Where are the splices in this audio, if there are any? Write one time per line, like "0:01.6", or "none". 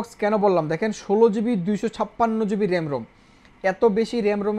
none